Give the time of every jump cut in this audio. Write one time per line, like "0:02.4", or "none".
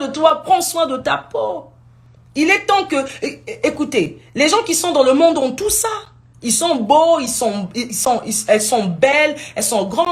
none